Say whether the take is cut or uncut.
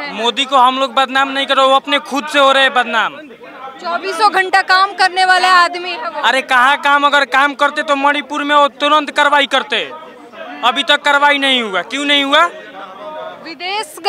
uncut